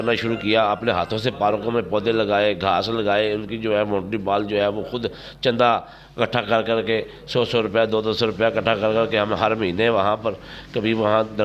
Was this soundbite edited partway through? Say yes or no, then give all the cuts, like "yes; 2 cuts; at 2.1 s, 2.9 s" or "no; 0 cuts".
no; 0 cuts